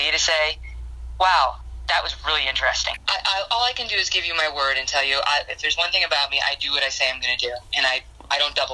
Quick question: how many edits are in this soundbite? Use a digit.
0